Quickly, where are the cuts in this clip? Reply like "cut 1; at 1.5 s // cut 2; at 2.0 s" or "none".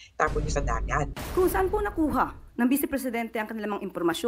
cut 1; at 1.2 s